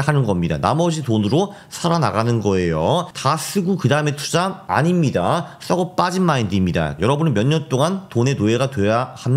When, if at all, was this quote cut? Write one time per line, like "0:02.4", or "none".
0:04.6
0:06.9